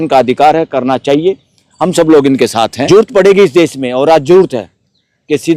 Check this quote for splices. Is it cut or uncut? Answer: cut